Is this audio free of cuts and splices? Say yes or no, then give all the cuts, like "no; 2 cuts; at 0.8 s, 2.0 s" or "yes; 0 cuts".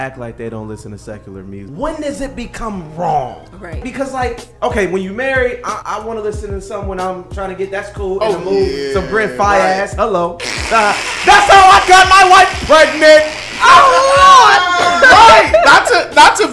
no; 3 cuts; at 1.6 s, 3.9 s, 5.8 s